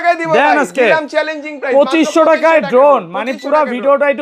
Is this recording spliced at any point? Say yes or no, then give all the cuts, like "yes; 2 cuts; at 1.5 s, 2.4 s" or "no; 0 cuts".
no; 0 cuts